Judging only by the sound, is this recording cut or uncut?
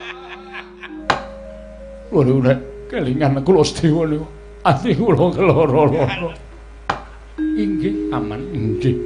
cut